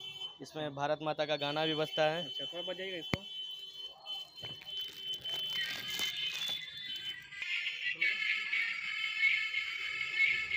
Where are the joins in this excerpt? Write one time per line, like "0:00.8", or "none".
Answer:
none